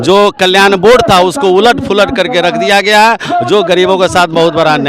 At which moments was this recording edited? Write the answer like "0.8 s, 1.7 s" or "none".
none